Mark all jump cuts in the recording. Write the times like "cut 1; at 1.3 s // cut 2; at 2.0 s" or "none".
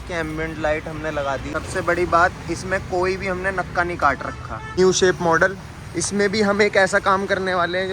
cut 1; at 1.5 s // cut 2; at 4.8 s